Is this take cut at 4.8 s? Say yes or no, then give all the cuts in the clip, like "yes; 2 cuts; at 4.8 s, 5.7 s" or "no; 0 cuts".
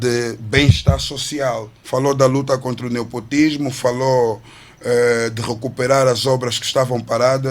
no; 1 cut; at 1.7 s